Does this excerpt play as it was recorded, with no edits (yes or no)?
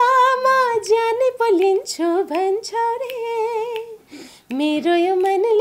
yes